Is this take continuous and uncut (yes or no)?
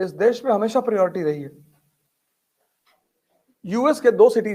no